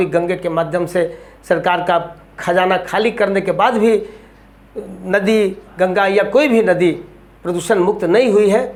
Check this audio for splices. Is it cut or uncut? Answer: uncut